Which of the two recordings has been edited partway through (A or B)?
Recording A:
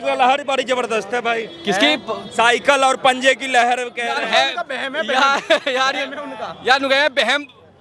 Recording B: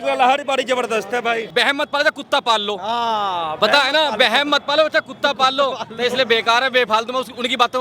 B